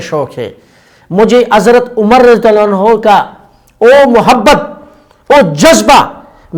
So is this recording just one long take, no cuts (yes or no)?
yes